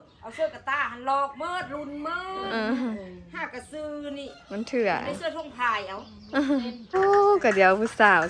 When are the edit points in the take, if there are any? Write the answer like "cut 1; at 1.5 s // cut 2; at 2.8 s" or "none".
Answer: cut 1; at 6.9 s